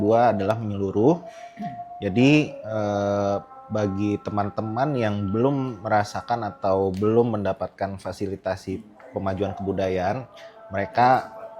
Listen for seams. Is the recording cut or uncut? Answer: uncut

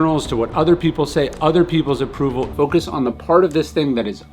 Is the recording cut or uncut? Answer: cut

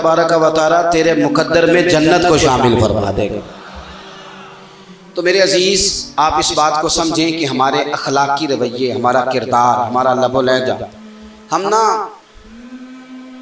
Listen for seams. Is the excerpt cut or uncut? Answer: cut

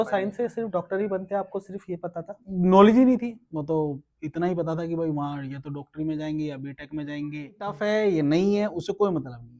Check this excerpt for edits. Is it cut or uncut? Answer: cut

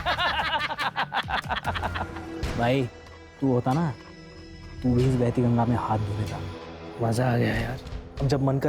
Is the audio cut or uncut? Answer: cut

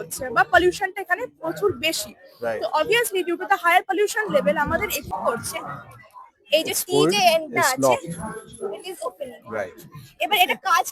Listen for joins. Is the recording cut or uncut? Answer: cut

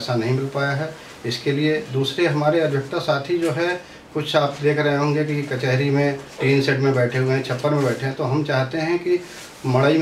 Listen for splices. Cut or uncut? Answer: uncut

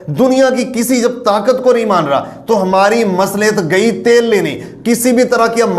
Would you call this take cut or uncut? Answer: uncut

